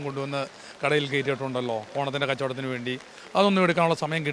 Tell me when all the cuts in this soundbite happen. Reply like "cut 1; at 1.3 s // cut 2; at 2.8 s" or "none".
none

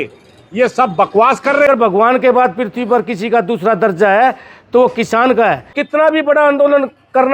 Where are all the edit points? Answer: cut 1; at 1.7 s // cut 2; at 5.8 s

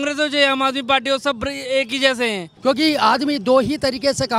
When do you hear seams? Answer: cut 1; at 2.5 s

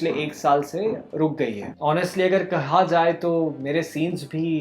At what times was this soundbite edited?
cut 1; at 1.7 s

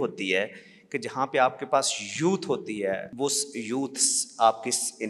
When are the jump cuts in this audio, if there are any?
cut 1; at 3.1 s

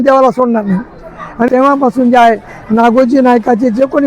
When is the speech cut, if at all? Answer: cut 1; at 1.5 s

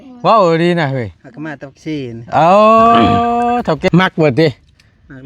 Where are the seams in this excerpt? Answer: cut 1; at 3.9 s

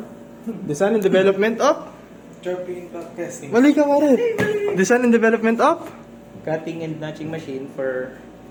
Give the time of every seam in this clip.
none

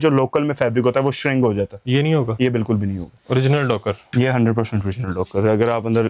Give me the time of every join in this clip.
cut 1; at 3.1 s

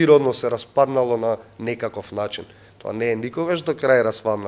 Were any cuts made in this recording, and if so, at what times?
none

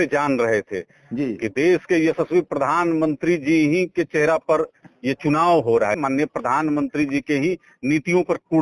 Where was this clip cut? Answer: cut 1; at 6.0 s

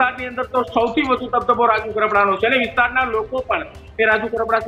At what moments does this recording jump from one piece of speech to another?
none

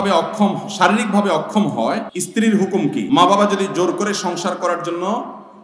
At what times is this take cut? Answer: cut 1; at 2.1 s // cut 2; at 3.0 s

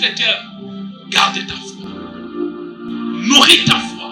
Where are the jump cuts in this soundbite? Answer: none

